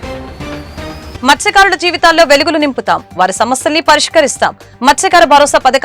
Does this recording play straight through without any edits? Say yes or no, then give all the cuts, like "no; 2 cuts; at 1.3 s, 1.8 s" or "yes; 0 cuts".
no; 1 cut; at 1.0 s